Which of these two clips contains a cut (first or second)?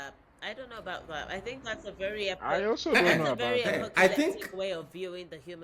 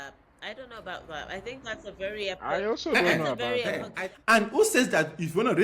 second